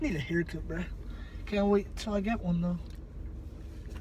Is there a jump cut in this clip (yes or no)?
no